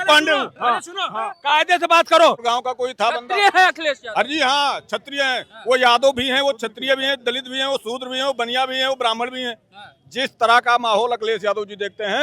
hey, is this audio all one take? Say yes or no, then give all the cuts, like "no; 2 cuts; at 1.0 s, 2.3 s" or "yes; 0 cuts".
no; 1 cut; at 2.4 s